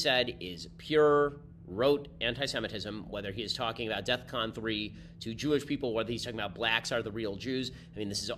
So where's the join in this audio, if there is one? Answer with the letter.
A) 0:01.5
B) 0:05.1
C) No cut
C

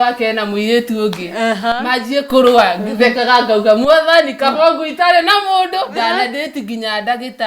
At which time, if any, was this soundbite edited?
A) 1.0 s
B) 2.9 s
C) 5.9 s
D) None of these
C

